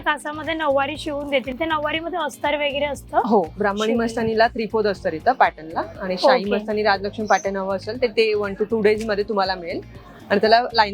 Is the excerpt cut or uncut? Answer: uncut